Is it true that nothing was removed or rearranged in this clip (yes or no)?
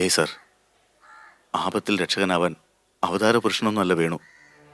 yes